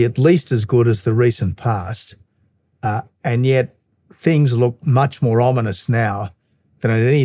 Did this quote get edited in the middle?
no; 0 cuts

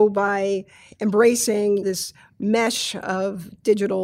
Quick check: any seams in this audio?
no; 0 cuts

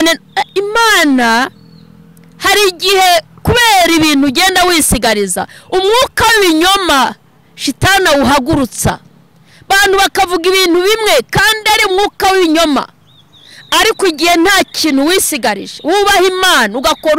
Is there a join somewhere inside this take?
no; 0 cuts

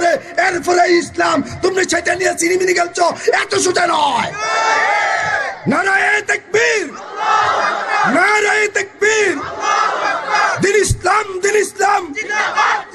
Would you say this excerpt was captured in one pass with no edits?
no; 1 cut; at 5.3 s

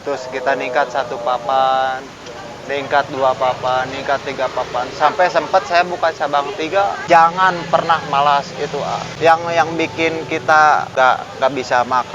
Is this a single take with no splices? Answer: no; 3 cuts; at 7.0 s, 9.1 s, 10.9 s

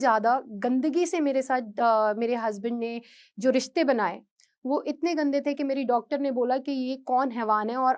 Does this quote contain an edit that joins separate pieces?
no; 0 cuts

